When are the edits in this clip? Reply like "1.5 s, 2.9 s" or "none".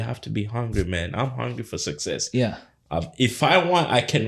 none

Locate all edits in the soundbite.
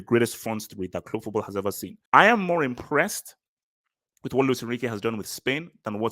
1.9 s

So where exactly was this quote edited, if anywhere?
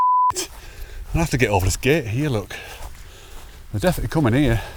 none

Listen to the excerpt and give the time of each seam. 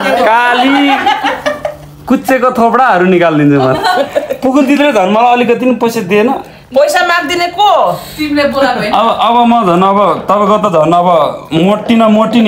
none

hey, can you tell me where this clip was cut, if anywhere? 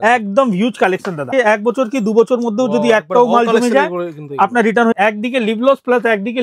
1.3 s, 4.9 s

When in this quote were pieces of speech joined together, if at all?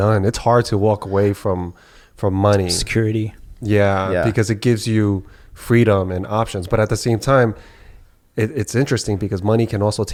none

